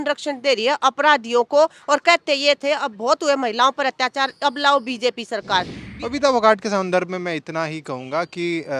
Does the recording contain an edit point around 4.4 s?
no; 1 cut; at 5.8 s

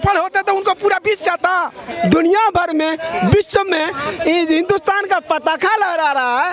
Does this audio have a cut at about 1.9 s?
yes; 1 cut; at 1.9 s

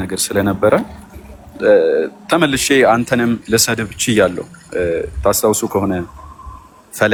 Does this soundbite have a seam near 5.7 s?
no; 0 cuts

